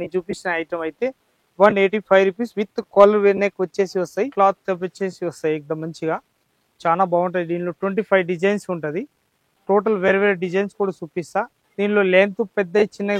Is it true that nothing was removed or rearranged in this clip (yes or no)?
no